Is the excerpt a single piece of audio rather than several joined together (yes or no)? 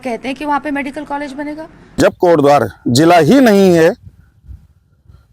no